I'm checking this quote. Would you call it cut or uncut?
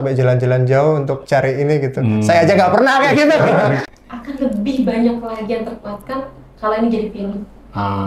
cut